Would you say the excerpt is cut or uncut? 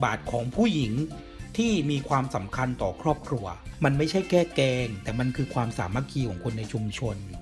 cut